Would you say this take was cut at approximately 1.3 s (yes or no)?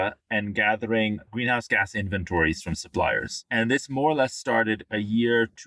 yes